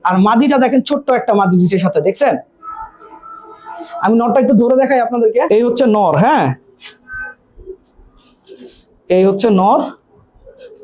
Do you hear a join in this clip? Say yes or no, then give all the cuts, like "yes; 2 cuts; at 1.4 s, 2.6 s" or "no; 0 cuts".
no; 0 cuts